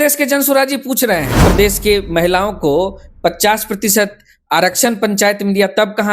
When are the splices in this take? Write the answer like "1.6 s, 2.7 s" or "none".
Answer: 1.4 s